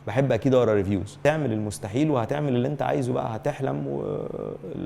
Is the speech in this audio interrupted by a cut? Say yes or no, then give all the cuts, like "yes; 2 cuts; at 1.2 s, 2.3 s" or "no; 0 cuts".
yes; 1 cut; at 1.1 s